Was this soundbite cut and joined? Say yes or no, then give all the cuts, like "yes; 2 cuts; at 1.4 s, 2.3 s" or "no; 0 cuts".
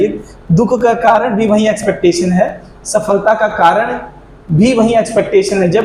no; 0 cuts